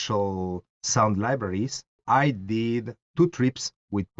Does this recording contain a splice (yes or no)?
yes